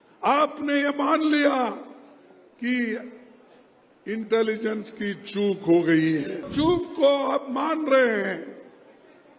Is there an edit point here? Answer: yes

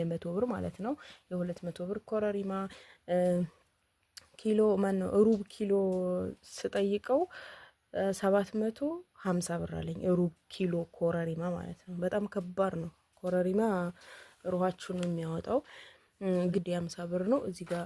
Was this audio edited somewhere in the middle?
yes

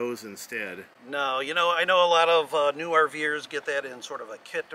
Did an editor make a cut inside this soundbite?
no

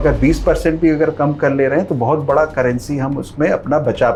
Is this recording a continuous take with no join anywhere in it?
yes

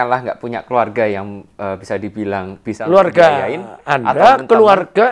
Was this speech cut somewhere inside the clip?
no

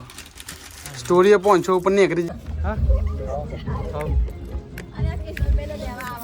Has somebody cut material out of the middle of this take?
yes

